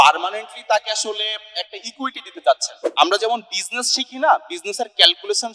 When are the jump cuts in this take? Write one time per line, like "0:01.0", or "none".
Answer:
0:02.8